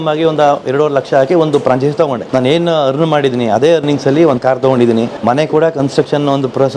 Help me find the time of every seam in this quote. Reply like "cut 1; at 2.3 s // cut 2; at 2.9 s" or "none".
cut 1; at 2.2 s // cut 2; at 5.1 s